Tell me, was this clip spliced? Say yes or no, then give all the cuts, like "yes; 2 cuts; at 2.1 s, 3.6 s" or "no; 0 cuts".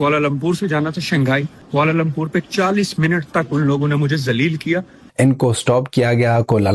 yes; 2 cuts; at 1.6 s, 5.0 s